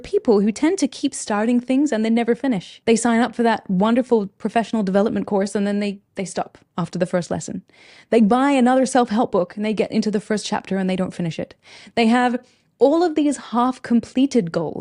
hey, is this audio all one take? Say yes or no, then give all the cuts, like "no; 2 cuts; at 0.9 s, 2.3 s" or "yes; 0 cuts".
no; 1 cut; at 2.7 s